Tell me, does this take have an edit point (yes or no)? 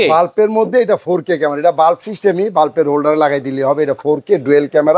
no